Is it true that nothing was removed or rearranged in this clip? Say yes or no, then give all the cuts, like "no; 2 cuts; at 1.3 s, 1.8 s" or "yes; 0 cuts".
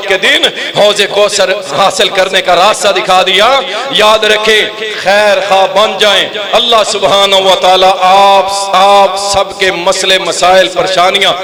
yes; 0 cuts